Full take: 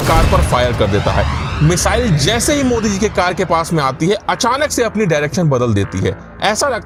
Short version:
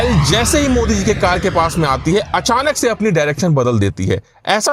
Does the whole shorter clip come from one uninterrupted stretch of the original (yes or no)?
yes